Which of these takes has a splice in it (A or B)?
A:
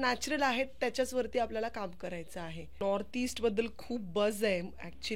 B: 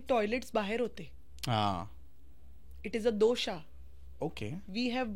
A